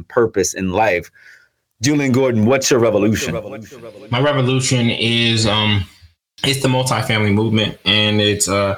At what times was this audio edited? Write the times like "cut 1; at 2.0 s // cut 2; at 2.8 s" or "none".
cut 1; at 6.2 s